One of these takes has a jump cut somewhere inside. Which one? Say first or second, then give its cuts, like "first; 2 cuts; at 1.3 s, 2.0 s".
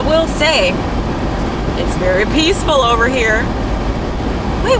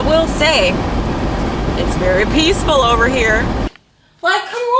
second; 1 cut; at 3.7 s